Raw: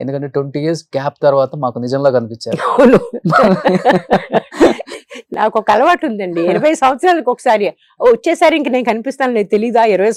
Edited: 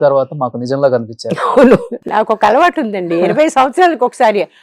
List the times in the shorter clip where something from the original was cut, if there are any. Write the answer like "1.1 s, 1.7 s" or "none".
1.9 s